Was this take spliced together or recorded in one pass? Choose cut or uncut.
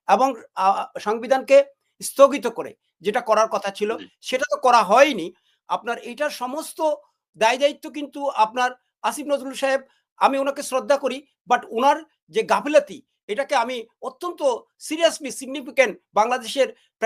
uncut